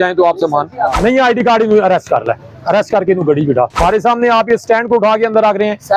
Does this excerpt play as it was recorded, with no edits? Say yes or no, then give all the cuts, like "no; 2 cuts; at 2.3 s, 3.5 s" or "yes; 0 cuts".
no; 2 cuts; at 1.0 s, 3.8 s